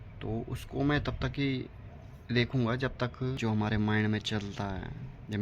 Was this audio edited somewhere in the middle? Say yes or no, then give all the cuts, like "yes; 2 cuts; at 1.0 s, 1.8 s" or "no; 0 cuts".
yes; 1 cut; at 3.4 s